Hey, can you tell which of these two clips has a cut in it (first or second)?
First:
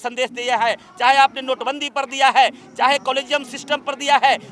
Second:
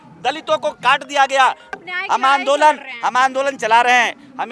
second